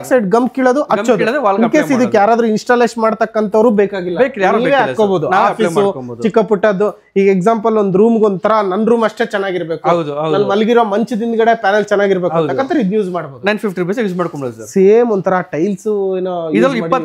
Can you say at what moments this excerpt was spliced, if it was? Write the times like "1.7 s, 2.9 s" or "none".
none